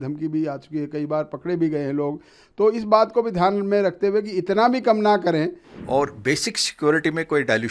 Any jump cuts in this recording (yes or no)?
yes